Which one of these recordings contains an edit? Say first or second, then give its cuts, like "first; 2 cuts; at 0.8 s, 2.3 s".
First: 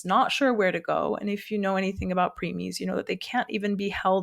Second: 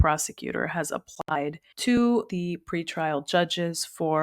second; 1 cut; at 2.3 s